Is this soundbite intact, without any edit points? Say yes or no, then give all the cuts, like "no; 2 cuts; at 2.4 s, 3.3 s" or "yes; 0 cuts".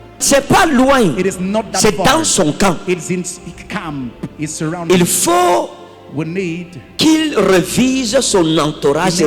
yes; 0 cuts